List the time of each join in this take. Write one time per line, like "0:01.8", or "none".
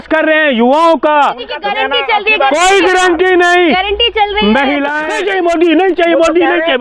0:01.5
0:05.1